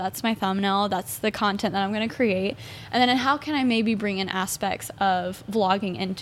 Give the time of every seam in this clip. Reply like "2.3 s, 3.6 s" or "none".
none